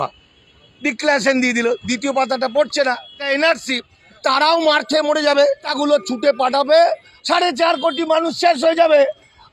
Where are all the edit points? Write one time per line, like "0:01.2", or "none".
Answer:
0:03.2
0:04.2
0:05.7
0:07.1